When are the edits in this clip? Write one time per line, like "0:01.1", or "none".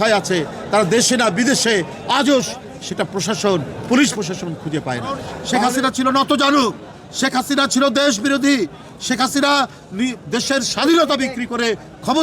0:05.4